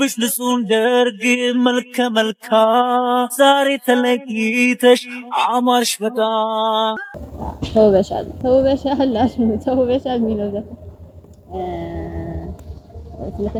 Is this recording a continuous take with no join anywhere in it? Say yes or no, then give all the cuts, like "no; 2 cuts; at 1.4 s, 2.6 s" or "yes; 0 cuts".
yes; 0 cuts